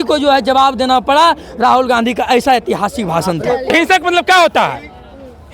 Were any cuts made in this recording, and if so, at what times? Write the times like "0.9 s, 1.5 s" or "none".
3.7 s

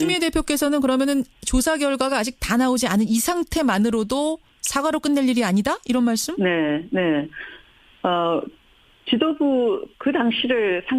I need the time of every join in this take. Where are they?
none

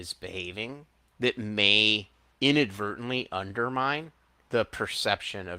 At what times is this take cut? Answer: 1.0 s, 2.2 s, 4.4 s

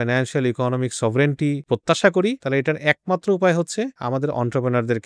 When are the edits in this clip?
1.6 s, 2.4 s, 4.0 s

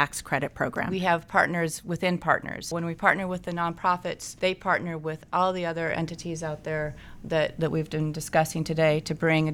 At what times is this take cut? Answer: 0.9 s, 2.7 s, 4.3 s

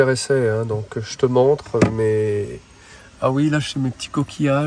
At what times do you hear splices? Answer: none

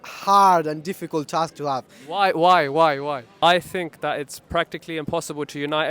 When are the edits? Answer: 3.3 s

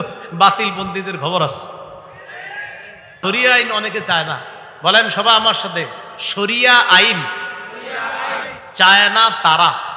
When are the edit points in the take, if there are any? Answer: 3.2 s

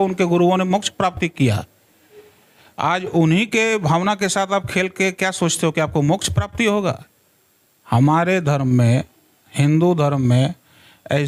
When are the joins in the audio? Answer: none

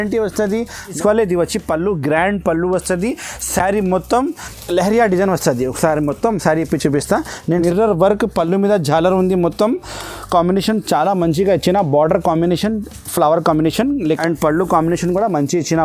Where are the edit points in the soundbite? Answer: 1.0 s, 4.5 s, 7.5 s, 14.0 s

